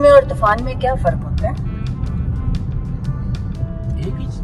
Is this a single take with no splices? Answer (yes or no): yes